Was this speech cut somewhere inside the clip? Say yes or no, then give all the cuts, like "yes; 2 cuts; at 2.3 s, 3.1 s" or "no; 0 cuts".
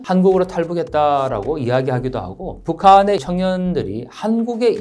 yes; 2 cuts; at 2.6 s, 3.2 s